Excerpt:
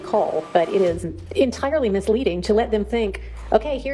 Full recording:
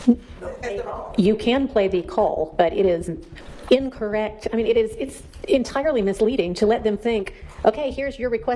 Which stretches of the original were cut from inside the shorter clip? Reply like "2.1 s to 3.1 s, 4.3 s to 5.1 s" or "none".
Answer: 3.2 s to 5.3 s